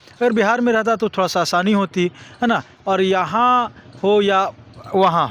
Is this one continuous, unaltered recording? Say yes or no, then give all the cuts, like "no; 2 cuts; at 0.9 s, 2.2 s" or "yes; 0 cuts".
yes; 0 cuts